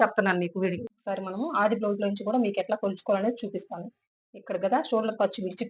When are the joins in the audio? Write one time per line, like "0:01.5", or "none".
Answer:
0:00.9